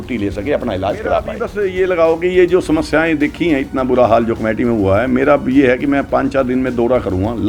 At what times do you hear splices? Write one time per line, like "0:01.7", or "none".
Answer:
0:01.4